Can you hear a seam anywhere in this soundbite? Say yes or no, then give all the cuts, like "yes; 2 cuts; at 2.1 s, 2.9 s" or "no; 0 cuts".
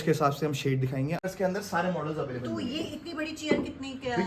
yes; 1 cut; at 1.2 s